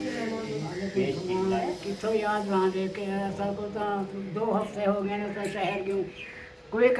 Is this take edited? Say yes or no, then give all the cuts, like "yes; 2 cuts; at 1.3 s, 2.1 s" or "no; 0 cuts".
yes; 1 cut; at 1.7 s